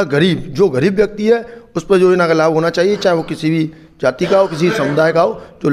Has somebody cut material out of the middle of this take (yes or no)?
no